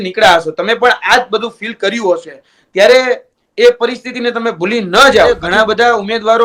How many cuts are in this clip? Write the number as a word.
one